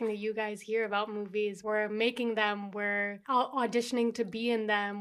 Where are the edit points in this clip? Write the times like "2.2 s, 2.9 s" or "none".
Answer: 1.6 s, 3.2 s